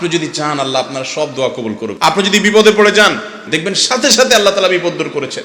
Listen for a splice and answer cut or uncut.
cut